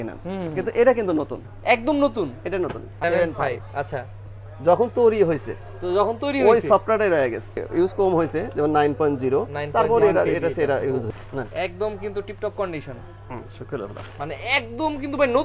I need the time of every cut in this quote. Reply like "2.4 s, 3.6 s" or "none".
2.9 s, 7.6 s, 11.1 s